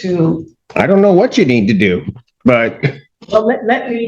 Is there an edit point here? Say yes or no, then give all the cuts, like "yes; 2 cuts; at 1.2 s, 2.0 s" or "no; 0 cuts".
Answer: yes; 1 cut; at 3.1 s